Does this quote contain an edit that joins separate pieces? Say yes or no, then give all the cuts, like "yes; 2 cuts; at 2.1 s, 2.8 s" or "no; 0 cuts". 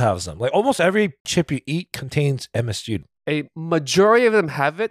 yes; 2 cuts; at 1.3 s, 3.0 s